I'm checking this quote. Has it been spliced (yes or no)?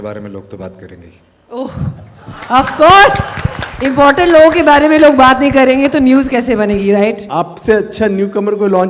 yes